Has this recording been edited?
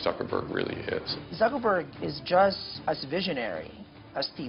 yes; 2 cuts; at 1.1 s, 2.7 s

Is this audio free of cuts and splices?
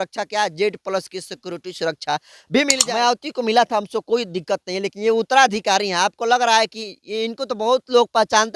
no; 1 cut; at 2.8 s

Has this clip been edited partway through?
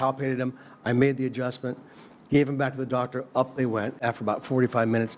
yes; 1 cut; at 4.0 s

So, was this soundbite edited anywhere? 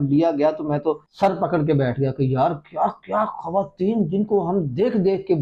no; 0 cuts

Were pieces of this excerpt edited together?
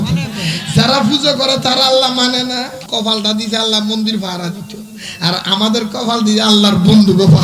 yes; 1 cut; at 2.8 s

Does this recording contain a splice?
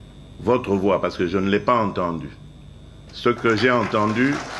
no; 0 cuts

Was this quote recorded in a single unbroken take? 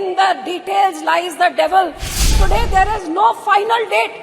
no; 1 cut; at 2.2 s

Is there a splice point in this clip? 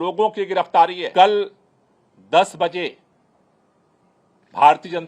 yes; 1 cut; at 1.0 s

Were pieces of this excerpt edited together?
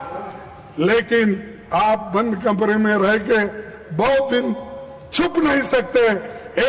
no; 0 cuts

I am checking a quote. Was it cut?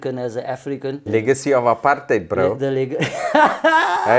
yes; 1 cut; at 1.0 s

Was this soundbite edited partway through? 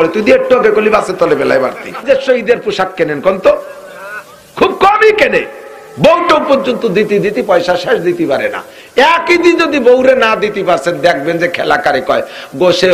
yes; 1 cut; at 2.0 s

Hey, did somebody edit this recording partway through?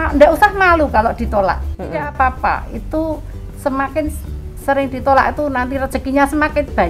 no; 0 cuts

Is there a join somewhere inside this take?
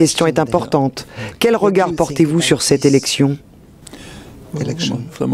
yes; 1 cut; at 4.0 s

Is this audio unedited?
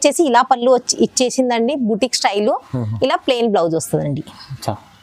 yes; 0 cuts

